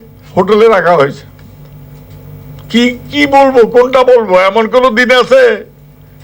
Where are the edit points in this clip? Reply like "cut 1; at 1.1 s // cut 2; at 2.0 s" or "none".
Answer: none